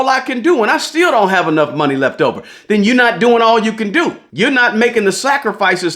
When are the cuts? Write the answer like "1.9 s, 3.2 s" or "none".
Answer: 4.2 s

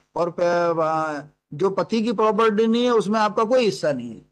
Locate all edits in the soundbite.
none

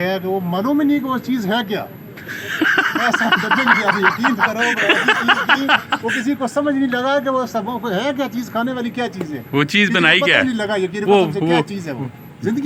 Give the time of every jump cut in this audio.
none

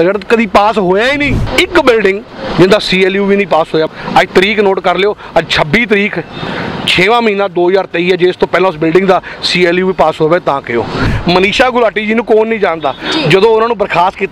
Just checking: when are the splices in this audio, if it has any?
1.4 s, 3.9 s, 11.1 s

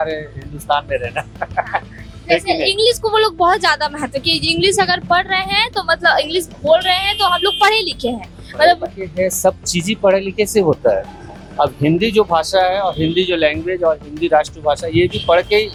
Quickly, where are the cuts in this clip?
none

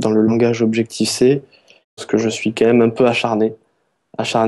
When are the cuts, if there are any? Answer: 2.0 s

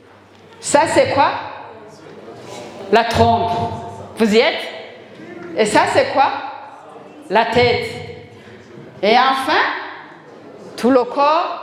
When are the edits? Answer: none

